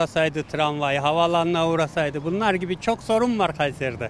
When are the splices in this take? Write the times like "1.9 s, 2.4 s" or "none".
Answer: none